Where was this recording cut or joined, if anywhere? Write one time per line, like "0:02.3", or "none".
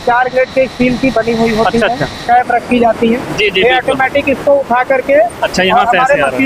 0:02.2